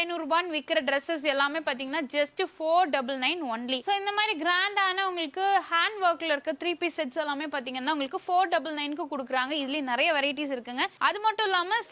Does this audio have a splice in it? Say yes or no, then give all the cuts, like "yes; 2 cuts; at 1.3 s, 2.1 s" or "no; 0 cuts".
no; 0 cuts